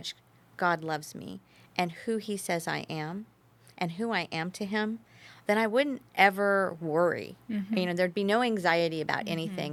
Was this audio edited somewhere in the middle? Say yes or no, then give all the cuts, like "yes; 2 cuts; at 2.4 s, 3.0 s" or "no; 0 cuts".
no; 0 cuts